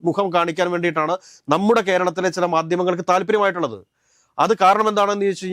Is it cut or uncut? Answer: uncut